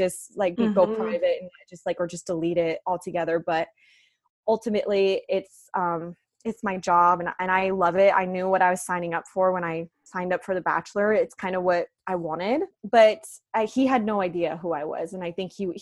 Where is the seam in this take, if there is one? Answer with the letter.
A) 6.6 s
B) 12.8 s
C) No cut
B